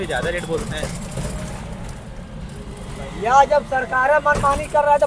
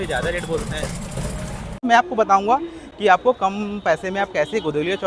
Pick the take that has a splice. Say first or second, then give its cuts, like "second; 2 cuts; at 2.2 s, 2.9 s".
second; 1 cut; at 1.8 s